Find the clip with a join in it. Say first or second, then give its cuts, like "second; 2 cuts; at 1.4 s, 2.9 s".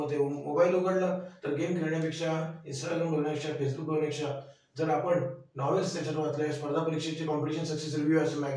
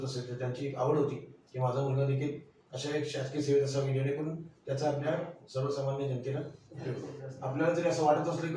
second; 1 cut; at 7.3 s